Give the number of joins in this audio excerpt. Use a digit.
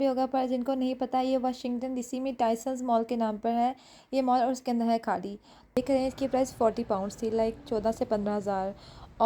1